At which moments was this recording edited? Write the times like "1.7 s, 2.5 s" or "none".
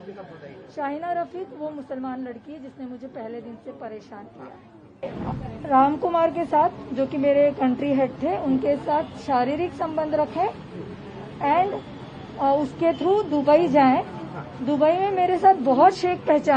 5.0 s